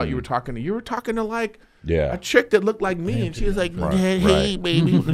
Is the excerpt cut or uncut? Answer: uncut